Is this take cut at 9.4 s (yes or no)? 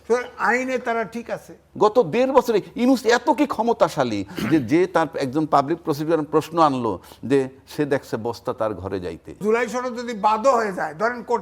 yes